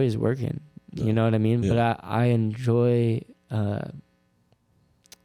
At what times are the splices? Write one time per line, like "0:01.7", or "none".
none